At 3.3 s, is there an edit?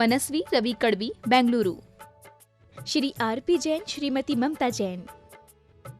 no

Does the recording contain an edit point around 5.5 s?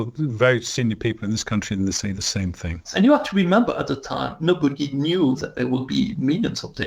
yes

